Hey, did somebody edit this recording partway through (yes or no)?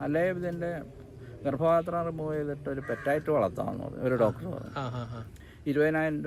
no